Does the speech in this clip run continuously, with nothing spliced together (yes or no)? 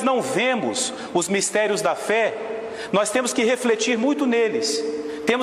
no